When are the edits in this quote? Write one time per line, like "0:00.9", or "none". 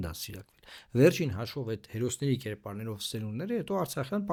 none